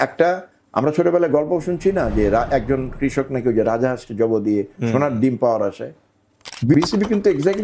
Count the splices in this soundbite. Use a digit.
1